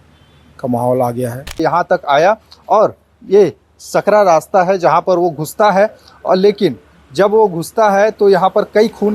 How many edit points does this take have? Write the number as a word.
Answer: one